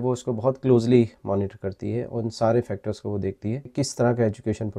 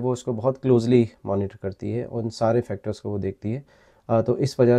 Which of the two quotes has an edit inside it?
first; 1 cut; at 3.8 s

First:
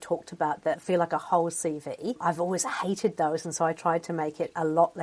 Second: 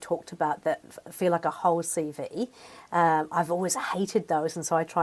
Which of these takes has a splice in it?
first; 2 cuts; at 0.8 s, 2.2 s

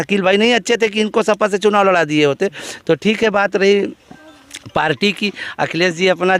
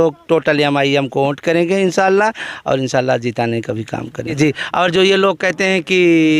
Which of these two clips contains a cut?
second; 1 cut; at 4.3 s

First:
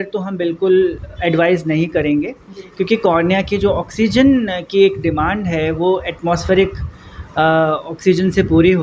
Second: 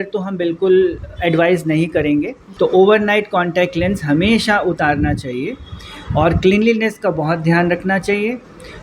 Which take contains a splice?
second; 1 cut; at 2.4 s

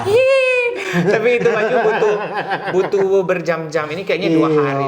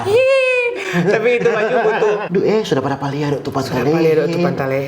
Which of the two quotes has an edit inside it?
second; 1 cut; at 2.2 s

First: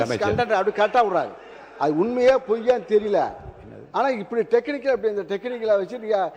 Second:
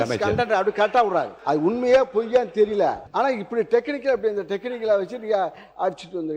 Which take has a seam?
second; 2 cuts; at 1.3 s, 3.0 s

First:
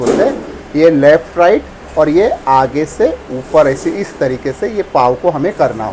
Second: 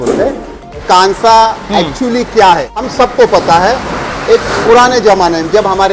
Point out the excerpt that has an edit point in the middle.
second; 2 cuts; at 0.8 s, 2.8 s

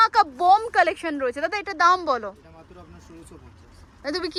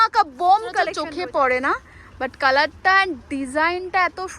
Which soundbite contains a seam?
second; 1 cut; at 1.0 s

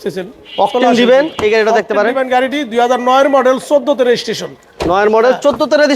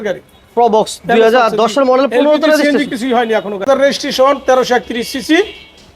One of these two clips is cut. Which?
second; 1 cut; at 3.7 s

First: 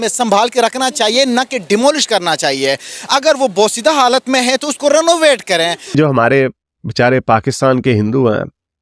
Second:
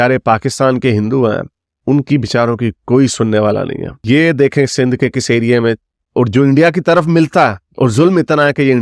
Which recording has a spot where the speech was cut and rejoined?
first; 1 cut; at 5.9 s

